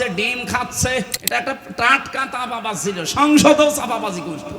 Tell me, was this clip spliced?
yes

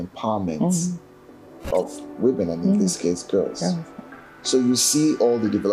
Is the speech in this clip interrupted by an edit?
no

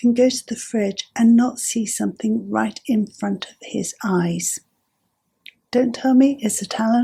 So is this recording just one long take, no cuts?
yes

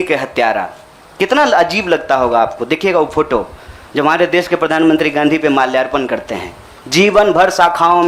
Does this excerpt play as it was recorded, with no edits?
yes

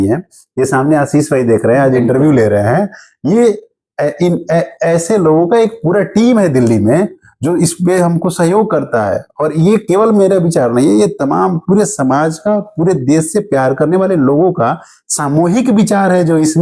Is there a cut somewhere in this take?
no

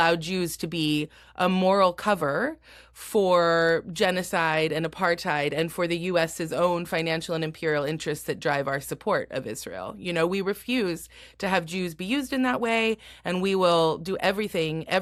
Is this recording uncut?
yes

